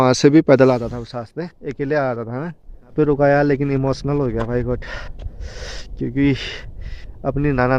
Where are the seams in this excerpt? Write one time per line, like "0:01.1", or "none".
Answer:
0:02.9